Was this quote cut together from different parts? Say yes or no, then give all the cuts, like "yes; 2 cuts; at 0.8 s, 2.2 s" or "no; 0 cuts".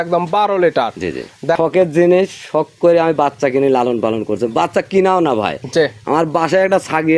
yes; 1 cut; at 1.6 s